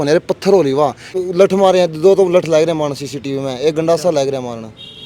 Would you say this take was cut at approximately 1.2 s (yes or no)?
yes